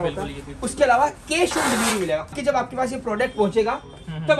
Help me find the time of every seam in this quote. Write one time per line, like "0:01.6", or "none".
0:02.4